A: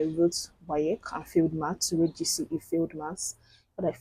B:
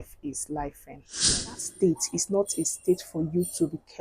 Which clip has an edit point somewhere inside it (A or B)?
B